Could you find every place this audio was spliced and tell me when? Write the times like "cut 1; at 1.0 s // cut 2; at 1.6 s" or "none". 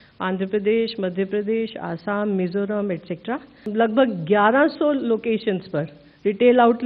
cut 1; at 3.6 s